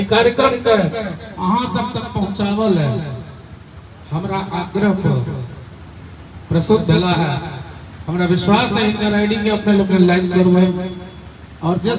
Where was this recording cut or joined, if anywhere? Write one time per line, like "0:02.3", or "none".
none